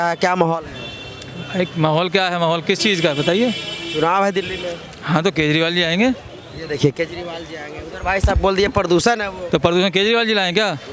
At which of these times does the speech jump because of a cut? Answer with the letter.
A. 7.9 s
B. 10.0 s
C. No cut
C